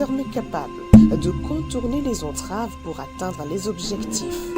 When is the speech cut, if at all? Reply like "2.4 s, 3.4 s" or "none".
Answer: none